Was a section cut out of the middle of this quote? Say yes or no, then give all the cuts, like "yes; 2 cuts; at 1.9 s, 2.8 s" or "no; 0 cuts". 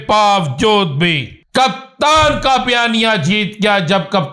yes; 1 cut; at 1.3 s